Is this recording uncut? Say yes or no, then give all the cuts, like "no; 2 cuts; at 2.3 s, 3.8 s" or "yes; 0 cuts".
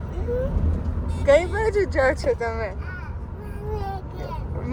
yes; 0 cuts